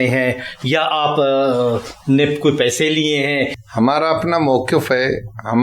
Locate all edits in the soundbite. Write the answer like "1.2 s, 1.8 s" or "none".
3.6 s